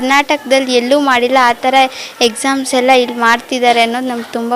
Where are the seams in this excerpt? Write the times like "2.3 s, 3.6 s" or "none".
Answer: none